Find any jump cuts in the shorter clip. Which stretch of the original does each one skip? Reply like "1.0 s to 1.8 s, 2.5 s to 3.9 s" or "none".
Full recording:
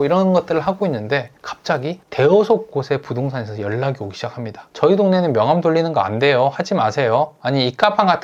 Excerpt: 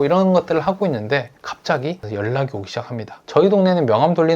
2.0 s to 3.5 s